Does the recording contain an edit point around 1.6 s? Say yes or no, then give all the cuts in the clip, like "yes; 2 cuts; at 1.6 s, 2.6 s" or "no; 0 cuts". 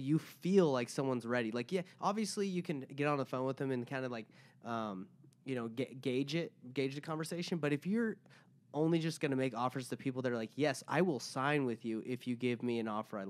no; 0 cuts